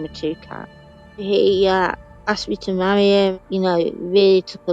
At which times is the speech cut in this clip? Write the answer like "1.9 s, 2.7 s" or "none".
1.2 s, 3.3 s